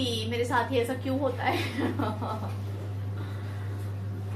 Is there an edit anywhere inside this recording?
no; 0 cuts

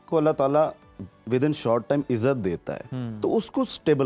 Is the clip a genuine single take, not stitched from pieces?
yes; 0 cuts

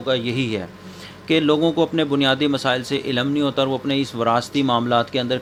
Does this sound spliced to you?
no; 0 cuts

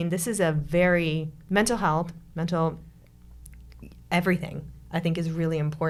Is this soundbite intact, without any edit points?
yes; 0 cuts

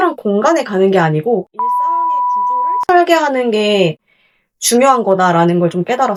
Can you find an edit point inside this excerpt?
no; 0 cuts

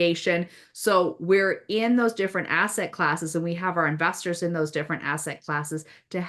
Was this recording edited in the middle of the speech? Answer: no; 0 cuts

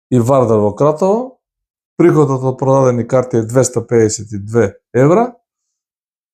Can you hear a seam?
no; 0 cuts

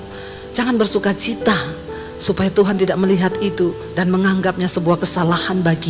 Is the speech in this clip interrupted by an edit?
no; 0 cuts

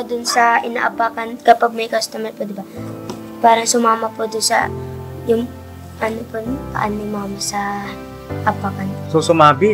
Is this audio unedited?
yes; 0 cuts

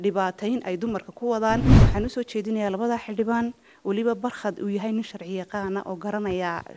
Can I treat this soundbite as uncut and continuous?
no; 1 cut; at 1.8 s

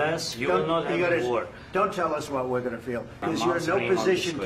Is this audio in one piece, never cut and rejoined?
no; 1 cut; at 3.2 s

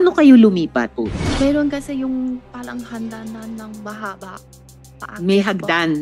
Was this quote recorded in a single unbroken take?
no; 1 cut; at 0.9 s

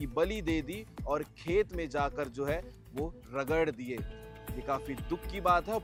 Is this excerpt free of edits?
yes; 0 cuts

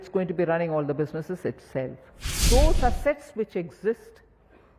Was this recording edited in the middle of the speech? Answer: yes; 1 cut; at 2.5 s

